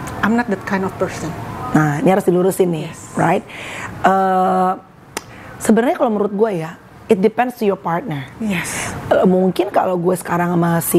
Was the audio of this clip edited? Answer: no; 0 cuts

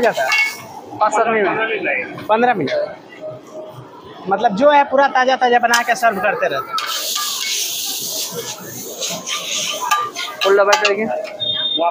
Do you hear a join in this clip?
no; 0 cuts

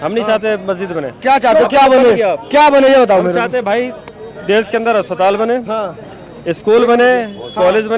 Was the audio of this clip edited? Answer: no; 0 cuts

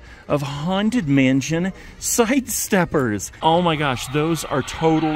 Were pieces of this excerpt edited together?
yes; 1 cut; at 3.3 s

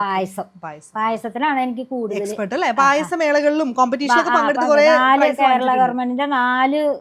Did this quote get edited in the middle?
no; 0 cuts

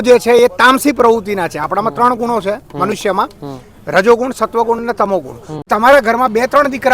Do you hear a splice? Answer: yes; 1 cut; at 5.5 s

